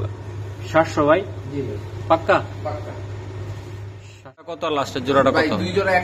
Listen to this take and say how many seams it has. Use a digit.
1